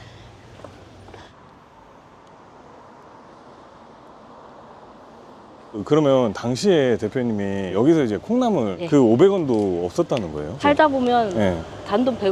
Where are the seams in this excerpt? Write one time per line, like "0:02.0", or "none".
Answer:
none